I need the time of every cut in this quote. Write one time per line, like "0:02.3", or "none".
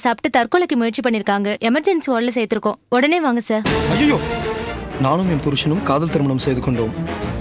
0:04.7